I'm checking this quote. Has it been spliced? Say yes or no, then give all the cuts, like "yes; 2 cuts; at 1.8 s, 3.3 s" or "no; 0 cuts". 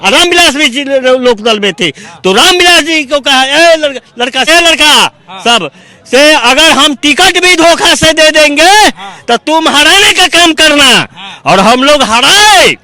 yes; 1 cut; at 4.5 s